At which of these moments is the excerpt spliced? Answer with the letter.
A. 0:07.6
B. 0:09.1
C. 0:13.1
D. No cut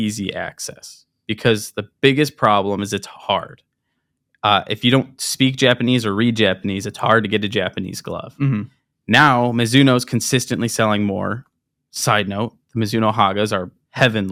D